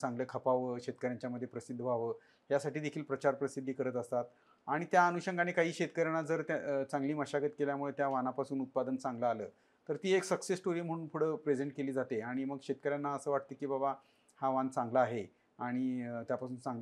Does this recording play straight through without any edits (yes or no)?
yes